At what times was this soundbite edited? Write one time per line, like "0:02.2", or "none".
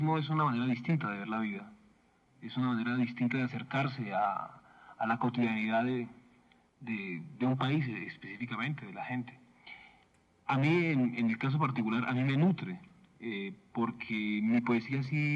0:09.6